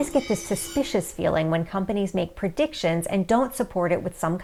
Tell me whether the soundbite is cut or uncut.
uncut